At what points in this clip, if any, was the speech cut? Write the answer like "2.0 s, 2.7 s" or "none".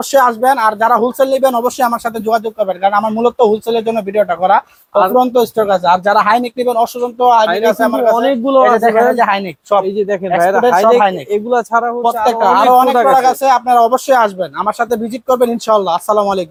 none